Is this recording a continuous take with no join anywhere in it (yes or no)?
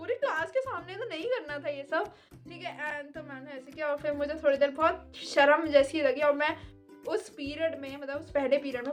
yes